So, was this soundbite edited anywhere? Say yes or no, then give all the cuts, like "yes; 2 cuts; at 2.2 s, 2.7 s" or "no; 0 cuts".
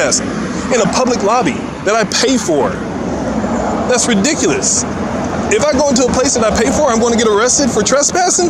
no; 0 cuts